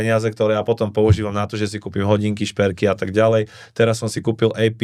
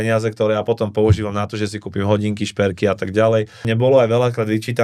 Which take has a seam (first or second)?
second